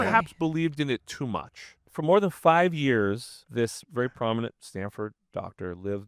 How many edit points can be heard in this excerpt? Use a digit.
3